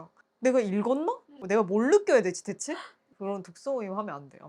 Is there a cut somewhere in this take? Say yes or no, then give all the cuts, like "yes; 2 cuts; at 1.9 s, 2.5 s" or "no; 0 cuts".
yes; 2 cuts; at 1.4 s, 3.1 s